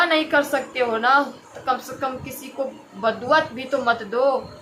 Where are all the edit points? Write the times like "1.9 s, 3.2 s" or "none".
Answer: none